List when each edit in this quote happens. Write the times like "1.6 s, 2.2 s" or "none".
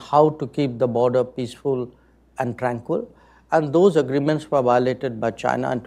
none